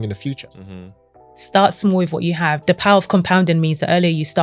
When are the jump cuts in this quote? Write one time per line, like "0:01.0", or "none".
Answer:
0:01.0
0:02.6